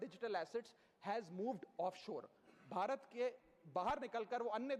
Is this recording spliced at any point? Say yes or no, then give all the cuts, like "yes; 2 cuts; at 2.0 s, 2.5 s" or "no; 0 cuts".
no; 0 cuts